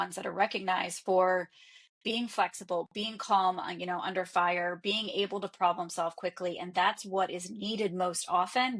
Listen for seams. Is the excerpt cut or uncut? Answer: uncut